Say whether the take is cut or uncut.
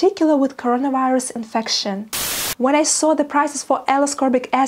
cut